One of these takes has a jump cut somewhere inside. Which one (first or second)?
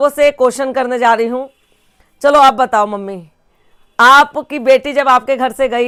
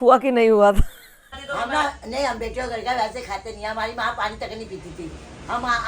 second